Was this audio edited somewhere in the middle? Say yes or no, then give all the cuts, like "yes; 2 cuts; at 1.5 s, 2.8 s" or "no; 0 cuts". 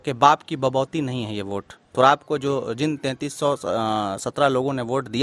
no; 0 cuts